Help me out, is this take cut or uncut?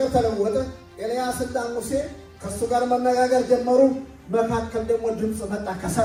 uncut